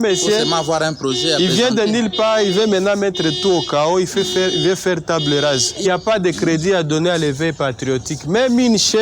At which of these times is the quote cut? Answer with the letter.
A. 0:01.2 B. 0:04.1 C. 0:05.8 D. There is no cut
C